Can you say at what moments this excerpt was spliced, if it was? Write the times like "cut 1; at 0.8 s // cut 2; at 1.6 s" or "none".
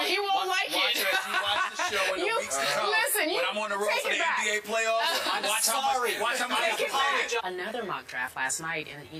none